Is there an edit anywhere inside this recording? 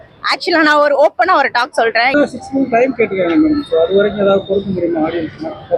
yes; 1 cut; at 2.1 s

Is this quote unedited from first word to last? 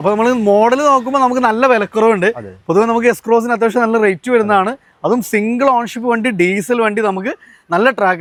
yes; 0 cuts

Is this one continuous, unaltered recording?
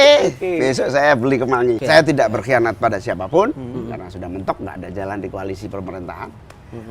no; 1 cut; at 1.8 s

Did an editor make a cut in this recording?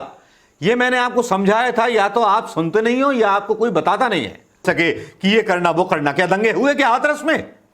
yes; 1 cut; at 4.6 s

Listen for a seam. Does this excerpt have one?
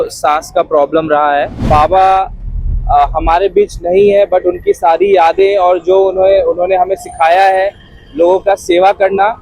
yes; 1 cut; at 1.6 s

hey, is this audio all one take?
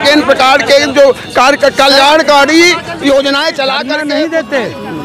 no; 1 cut; at 4.0 s

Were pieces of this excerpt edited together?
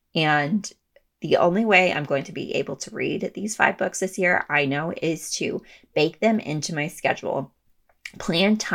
yes; 1 cut; at 1.1 s

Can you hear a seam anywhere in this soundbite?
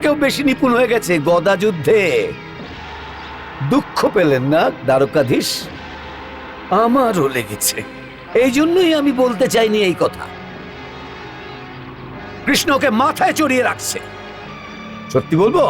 no; 0 cuts

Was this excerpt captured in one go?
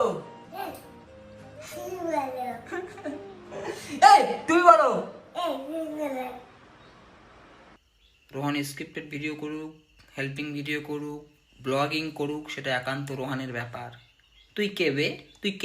no; 1 cut; at 7.8 s

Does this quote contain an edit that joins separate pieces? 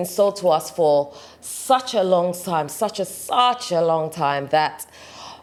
no; 0 cuts

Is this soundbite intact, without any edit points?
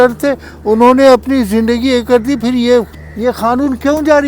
no; 1 cut; at 2.9 s

